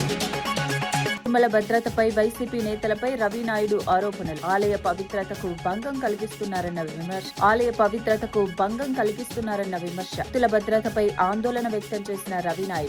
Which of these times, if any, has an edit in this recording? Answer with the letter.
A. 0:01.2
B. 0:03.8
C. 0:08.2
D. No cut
A